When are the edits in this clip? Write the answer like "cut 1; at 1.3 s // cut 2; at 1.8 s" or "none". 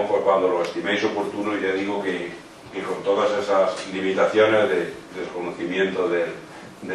none